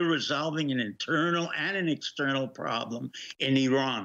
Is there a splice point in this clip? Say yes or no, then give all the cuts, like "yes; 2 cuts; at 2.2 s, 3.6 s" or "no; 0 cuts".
no; 0 cuts